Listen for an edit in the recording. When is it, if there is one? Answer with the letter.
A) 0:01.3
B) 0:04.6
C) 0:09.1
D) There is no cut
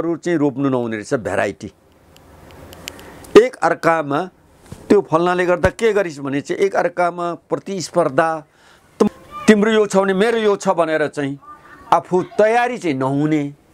C